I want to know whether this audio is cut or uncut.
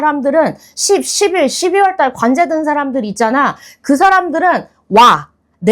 uncut